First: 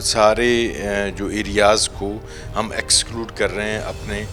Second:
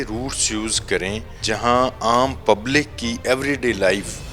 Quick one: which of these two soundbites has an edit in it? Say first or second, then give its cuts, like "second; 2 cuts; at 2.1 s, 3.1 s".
second; 1 cut; at 1.4 s